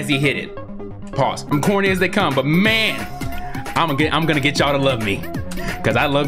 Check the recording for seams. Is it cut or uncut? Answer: cut